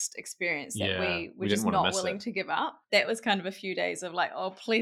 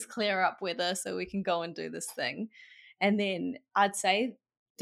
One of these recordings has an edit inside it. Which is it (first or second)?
first